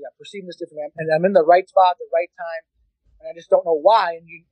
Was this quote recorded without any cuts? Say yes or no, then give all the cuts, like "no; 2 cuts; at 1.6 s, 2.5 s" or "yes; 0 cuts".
yes; 0 cuts